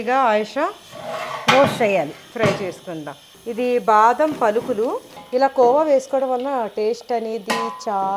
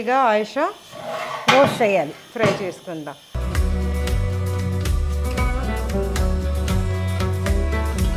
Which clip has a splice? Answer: first; 2 cuts; at 3.4 s, 5.1 s

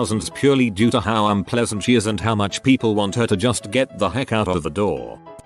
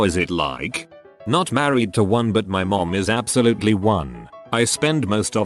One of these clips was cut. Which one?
second; 1 cut; at 1.1 s

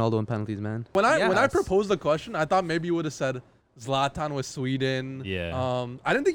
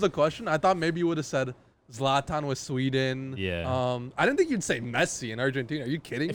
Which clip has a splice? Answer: first; 1 cut; at 0.9 s

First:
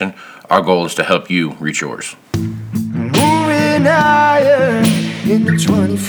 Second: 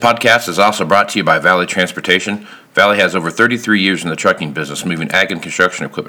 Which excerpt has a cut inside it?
first; 1 cut; at 2.1 s

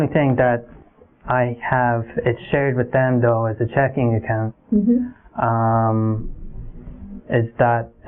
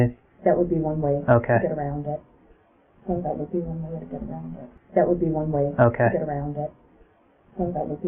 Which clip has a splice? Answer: second; 1 cut; at 4.8 s

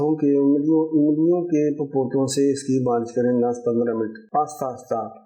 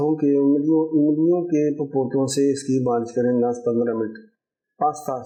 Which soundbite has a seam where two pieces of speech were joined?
first; 1 cut; at 4.2 s

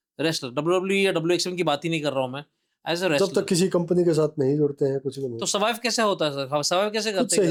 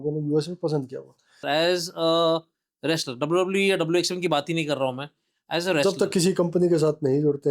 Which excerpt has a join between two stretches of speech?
second; 1 cut; at 1.4 s

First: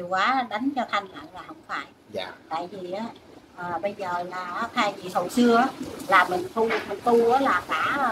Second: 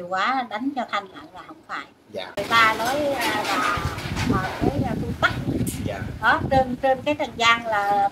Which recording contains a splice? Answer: second; 1 cut; at 2.3 s

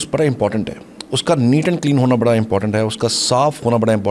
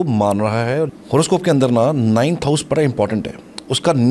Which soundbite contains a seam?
second; 1 cut; at 0.9 s

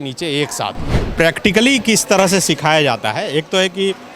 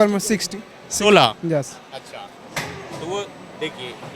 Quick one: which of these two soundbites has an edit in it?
first; 1 cut; at 1.0 s

